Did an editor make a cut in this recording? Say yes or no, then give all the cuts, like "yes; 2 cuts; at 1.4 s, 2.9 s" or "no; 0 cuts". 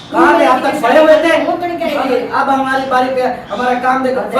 no; 0 cuts